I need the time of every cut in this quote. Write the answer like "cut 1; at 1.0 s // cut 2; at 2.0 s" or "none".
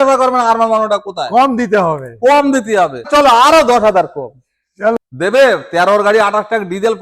cut 1; at 3.1 s // cut 2; at 4.9 s